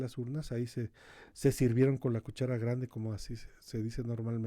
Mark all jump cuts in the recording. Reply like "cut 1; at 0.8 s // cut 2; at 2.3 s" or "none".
none